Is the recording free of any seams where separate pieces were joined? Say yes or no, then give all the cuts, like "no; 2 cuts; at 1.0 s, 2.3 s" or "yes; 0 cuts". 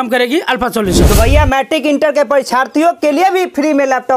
yes; 0 cuts